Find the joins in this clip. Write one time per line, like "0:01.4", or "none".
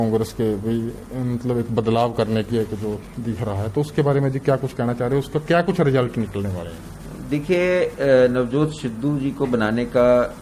none